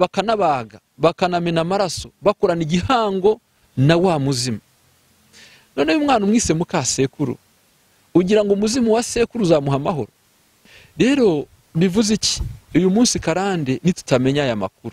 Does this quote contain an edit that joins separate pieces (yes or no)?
yes